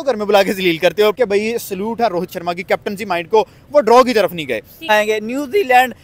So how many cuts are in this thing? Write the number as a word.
two